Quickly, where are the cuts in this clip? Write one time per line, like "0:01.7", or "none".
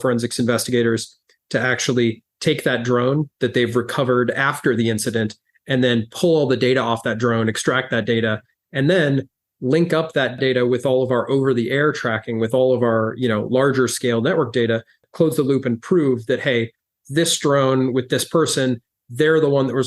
0:10.3
0:15.1

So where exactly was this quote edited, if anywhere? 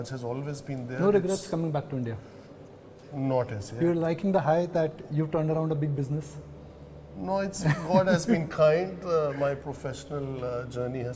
none

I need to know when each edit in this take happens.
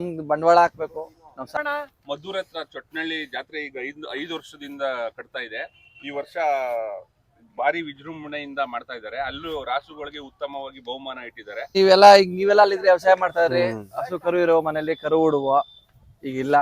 0:01.6
0:11.7

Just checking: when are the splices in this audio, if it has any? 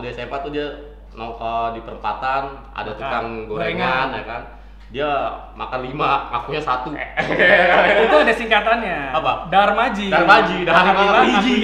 none

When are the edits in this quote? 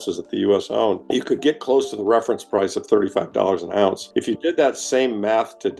0:01.0
0:04.0

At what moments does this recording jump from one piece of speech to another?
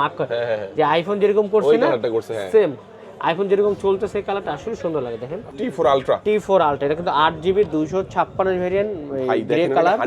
0:05.5

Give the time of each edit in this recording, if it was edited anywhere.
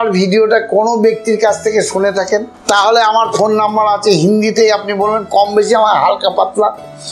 0:02.5

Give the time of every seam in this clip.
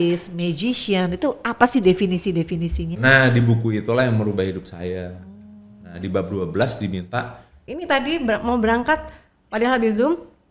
0:02.9
0:07.6

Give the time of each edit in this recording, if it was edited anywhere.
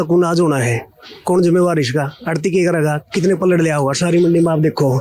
none

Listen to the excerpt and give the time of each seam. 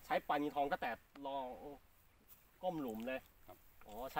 none

